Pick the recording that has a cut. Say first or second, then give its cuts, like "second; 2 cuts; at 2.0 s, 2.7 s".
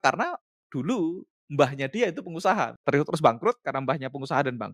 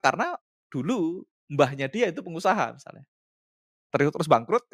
first; 1 cut; at 2.8 s